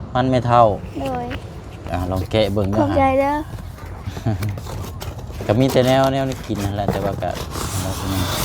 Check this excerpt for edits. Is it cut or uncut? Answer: cut